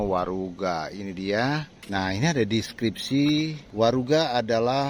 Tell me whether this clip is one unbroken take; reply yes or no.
no